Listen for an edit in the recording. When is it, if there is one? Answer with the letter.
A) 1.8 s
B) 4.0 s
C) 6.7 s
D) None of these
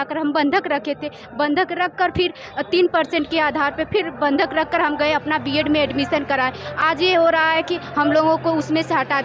D